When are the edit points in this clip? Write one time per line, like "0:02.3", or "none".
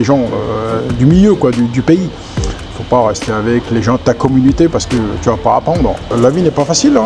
0:06.1